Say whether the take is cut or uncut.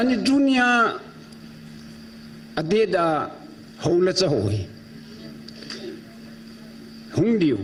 uncut